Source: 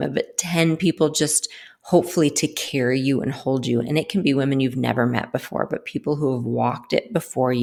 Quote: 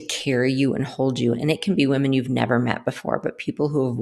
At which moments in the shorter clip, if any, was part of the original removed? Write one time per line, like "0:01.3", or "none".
none